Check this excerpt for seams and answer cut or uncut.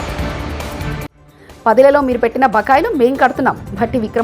cut